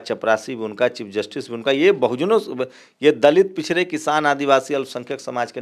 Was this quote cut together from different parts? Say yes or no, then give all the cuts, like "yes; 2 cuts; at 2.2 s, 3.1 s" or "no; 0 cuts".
no; 0 cuts